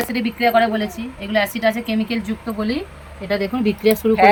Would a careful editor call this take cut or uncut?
uncut